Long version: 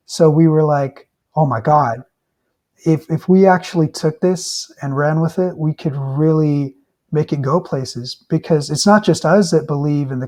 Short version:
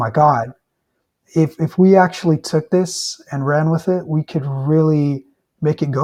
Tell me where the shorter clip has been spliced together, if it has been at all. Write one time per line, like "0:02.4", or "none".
none